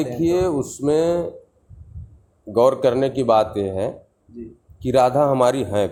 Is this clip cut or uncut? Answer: uncut